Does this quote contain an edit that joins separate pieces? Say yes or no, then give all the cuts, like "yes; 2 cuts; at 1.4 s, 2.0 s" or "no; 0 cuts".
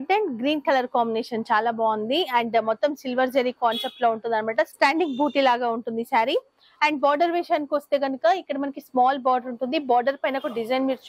no; 0 cuts